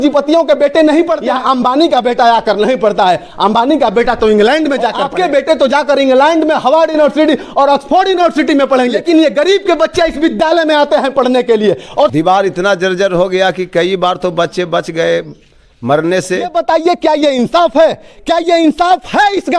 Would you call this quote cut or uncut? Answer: cut